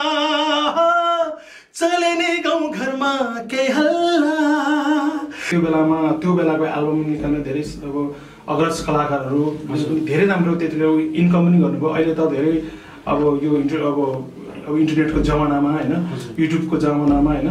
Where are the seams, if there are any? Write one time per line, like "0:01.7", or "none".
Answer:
0:05.4